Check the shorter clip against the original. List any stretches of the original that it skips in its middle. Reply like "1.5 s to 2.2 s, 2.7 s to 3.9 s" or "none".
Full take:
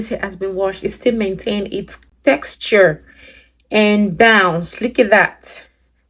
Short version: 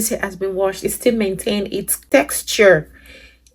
1.9 s to 2.0 s